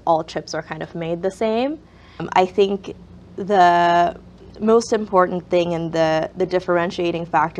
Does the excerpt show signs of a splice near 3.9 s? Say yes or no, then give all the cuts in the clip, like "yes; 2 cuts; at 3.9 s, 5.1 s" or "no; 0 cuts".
no; 1 cut; at 2.3 s